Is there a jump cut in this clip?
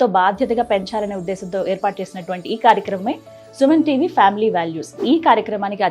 yes; 1 cut; at 4.9 s

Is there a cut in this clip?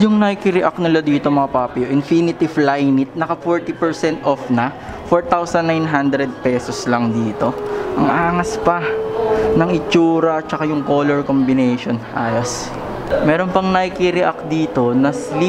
no; 0 cuts

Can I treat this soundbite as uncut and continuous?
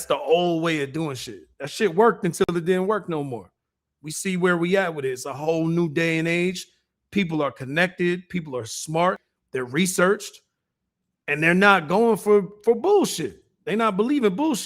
no; 1 cut; at 9.3 s

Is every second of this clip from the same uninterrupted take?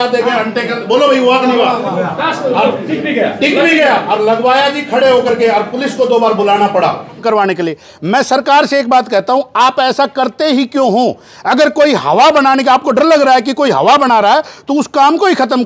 no; 1 cut; at 7.2 s

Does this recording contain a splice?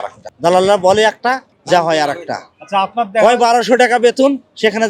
no; 0 cuts

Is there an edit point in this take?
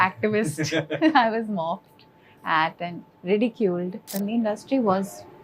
yes; 1 cut; at 4.1 s

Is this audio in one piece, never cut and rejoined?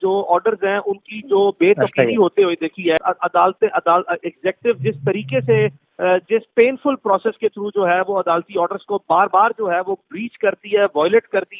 no; 1 cut; at 3.0 s

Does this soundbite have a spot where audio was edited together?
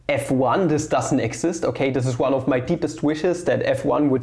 no; 0 cuts

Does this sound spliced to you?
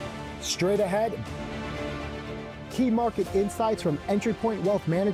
no; 0 cuts

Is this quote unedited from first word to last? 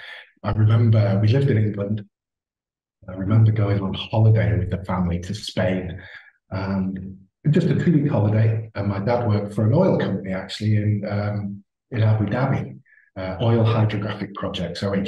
yes; 0 cuts

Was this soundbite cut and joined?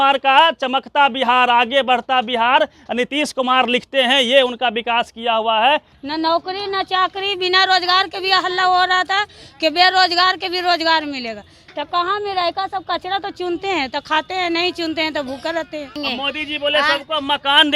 yes; 2 cuts; at 6.0 s, 15.9 s

